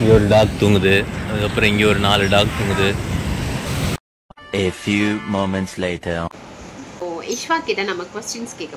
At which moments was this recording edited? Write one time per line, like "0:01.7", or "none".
0:03.7
0:07.0